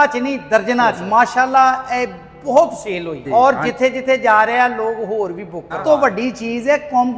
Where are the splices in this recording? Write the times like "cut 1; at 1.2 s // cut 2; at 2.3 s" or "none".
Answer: cut 1; at 1.0 s // cut 2; at 3.2 s // cut 3; at 5.7 s